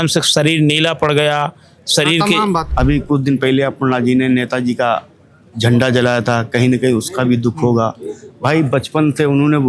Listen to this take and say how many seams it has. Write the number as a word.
one